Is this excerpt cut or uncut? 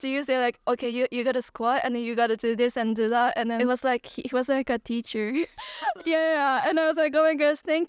cut